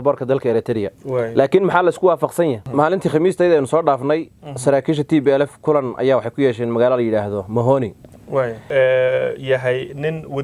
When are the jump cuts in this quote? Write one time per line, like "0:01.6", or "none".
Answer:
0:02.6
0:08.6